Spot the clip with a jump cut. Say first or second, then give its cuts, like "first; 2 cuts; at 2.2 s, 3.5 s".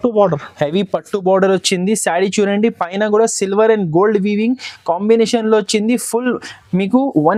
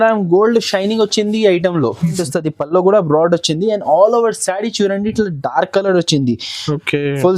second; 1 cut; at 2.2 s